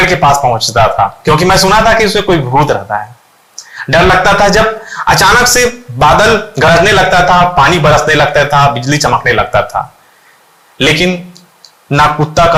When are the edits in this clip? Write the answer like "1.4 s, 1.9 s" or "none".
none